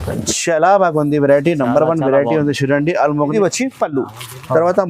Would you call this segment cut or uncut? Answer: cut